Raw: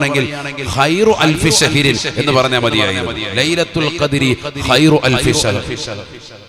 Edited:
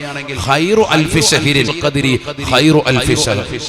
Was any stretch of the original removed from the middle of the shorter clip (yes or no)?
yes